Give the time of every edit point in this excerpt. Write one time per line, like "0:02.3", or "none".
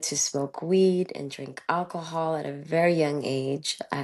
none